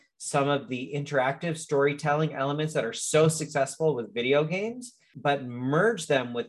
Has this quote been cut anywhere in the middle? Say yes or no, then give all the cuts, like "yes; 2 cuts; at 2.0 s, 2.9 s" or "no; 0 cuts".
yes; 1 cut; at 5.1 s